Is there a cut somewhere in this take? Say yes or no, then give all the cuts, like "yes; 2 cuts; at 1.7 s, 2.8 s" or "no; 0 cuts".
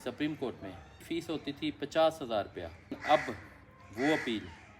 yes; 2 cuts; at 1.0 s, 3.0 s